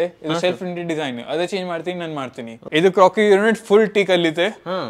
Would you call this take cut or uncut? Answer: cut